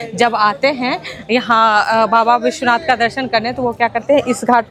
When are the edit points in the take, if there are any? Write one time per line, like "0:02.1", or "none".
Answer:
none